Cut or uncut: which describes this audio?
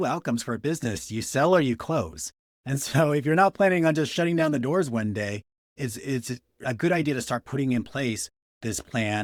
uncut